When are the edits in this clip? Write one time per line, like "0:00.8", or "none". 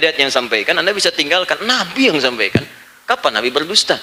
none